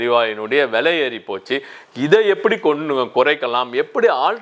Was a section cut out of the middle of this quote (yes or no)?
no